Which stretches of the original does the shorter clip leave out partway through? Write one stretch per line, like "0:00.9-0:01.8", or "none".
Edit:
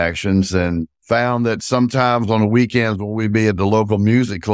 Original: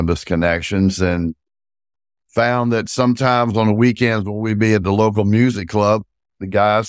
0:01.4-0:02.2